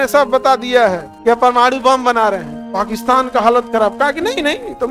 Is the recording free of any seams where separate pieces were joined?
no; 1 cut; at 1.1 s

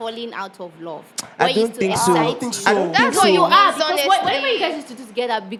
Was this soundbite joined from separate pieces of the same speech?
no; 0 cuts

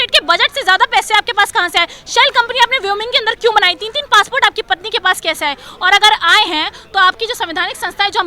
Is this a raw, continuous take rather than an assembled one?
yes; 0 cuts

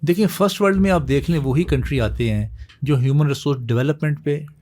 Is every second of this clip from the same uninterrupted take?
yes; 0 cuts

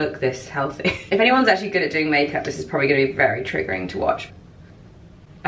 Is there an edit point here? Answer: yes; 2 cuts; at 1.0 s, 4.2 s

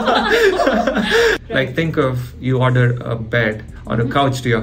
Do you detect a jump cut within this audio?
yes; 1 cut; at 1.4 s

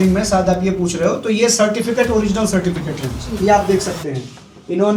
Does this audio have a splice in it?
no; 0 cuts

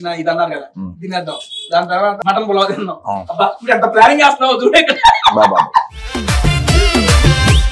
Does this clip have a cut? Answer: yes; 1 cut; at 2.2 s

